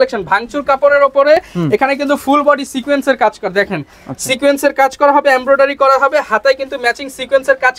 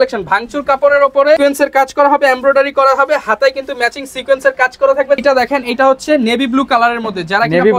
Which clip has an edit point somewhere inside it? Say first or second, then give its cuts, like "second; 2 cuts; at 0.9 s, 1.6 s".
second; 2 cuts; at 1.4 s, 5.2 s